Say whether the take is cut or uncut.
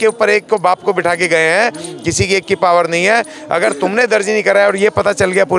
uncut